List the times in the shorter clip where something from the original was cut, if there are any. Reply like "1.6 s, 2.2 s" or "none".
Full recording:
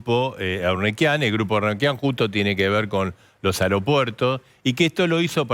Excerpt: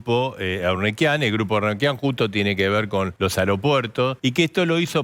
3.1 s, 4.2 s